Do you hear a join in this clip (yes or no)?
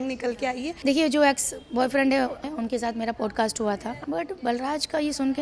yes